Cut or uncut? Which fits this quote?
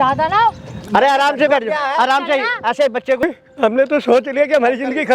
cut